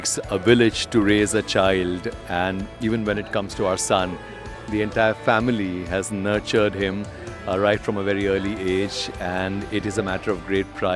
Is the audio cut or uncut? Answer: uncut